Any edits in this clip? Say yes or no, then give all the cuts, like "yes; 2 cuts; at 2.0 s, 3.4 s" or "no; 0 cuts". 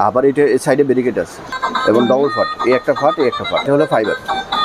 yes; 2 cuts; at 1.5 s, 3.7 s